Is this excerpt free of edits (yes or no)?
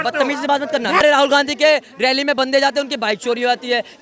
no